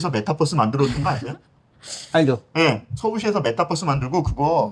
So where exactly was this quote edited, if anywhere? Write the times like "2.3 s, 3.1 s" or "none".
none